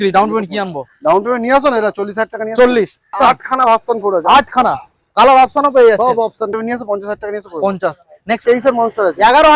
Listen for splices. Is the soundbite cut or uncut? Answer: cut